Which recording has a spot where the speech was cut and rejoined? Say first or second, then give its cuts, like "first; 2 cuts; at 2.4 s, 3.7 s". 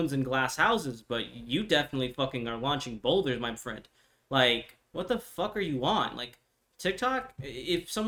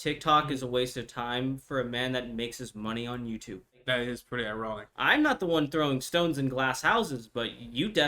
second; 2 cuts; at 3.8 s, 4.9 s